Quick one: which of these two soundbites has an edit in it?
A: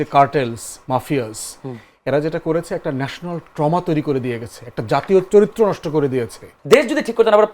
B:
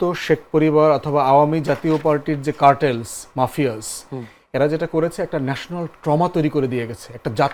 A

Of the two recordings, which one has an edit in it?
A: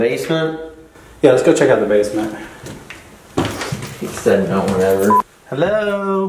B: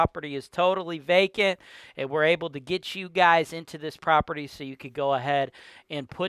A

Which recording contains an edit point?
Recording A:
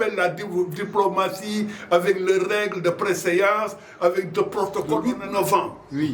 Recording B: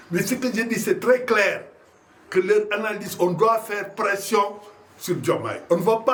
A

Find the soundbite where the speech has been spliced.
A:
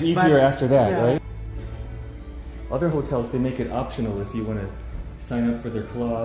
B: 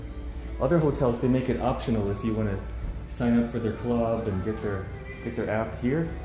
A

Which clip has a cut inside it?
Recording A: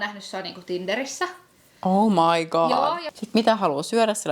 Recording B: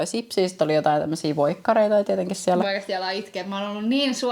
A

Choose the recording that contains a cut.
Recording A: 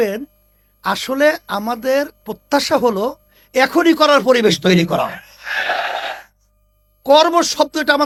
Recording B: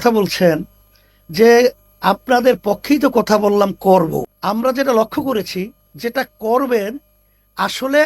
B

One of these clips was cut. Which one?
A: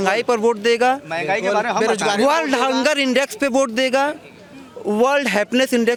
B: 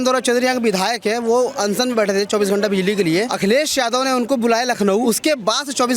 B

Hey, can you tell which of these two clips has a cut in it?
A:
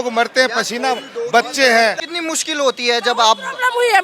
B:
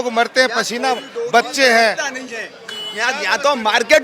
A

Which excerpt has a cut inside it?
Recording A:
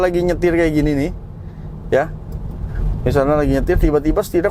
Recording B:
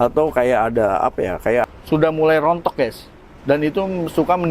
B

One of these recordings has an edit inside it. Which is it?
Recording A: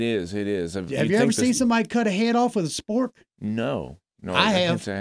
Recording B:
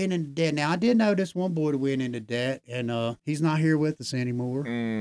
B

